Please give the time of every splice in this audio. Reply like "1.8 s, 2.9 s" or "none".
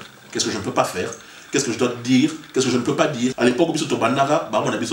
3.3 s

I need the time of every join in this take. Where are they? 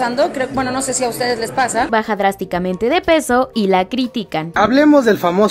1.9 s, 4.5 s

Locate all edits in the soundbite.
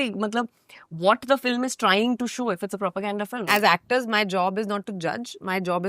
3.5 s

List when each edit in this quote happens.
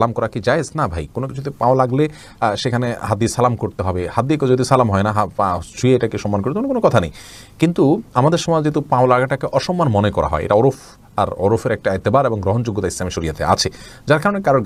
none

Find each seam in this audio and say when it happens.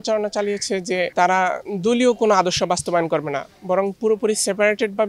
none

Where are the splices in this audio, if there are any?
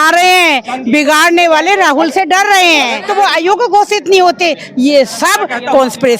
3.0 s

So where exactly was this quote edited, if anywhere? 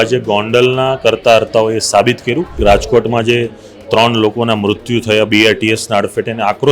2.5 s

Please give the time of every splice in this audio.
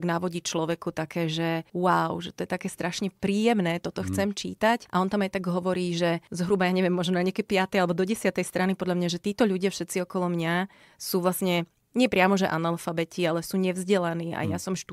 1.7 s, 4.8 s, 6.3 s

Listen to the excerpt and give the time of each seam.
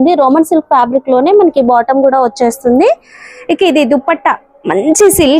none

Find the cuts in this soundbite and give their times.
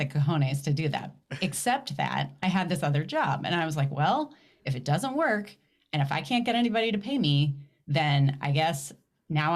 none

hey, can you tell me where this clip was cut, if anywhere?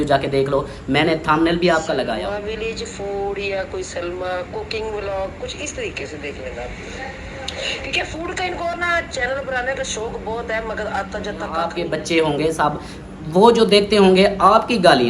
2.1 s, 11.7 s

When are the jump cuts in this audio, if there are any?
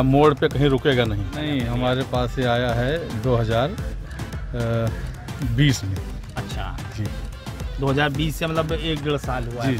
none

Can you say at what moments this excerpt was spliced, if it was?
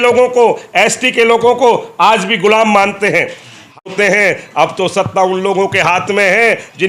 3.9 s

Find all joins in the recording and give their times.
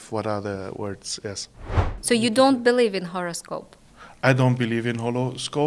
1.9 s

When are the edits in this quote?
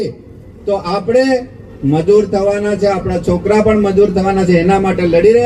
none

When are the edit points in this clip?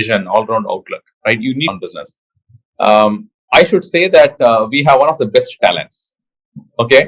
1.7 s

